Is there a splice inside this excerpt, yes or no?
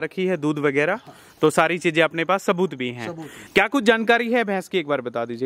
yes